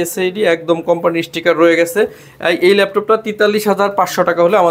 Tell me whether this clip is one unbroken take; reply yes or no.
yes